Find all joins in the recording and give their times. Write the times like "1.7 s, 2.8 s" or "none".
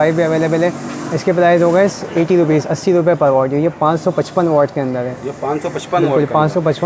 none